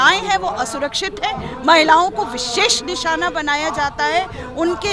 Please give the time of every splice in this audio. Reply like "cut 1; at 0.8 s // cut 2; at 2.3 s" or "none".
none

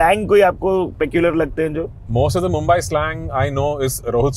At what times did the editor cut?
cut 1; at 2.0 s

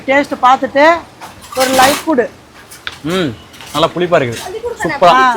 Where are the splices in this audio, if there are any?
none

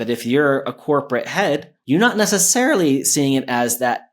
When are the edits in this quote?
cut 1; at 1.7 s

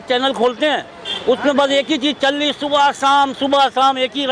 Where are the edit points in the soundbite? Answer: none

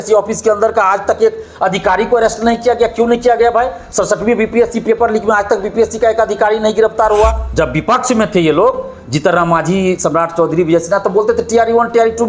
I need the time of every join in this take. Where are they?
cut 1; at 7.4 s

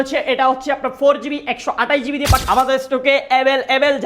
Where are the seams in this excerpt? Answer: cut 1; at 2.4 s

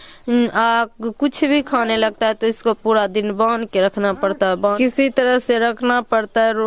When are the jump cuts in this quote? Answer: cut 1; at 4.8 s

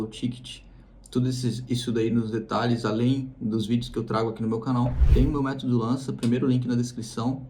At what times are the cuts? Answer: cut 1; at 5.0 s

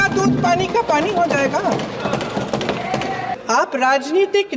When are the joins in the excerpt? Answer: cut 1; at 3.3 s

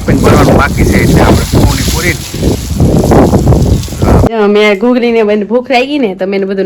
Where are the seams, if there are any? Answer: cut 1; at 4.3 s

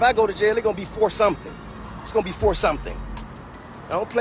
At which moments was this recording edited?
none

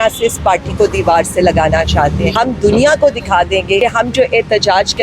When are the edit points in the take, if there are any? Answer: cut 1; at 2.3 s // cut 2; at 3.8 s

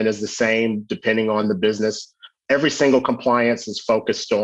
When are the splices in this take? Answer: cut 1; at 2.4 s

